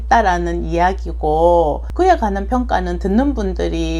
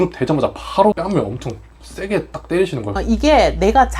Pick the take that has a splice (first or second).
second